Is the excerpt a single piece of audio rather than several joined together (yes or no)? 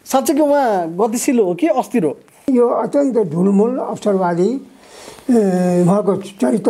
no